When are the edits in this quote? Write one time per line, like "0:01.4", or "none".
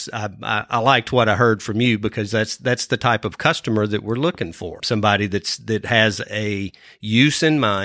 0:04.8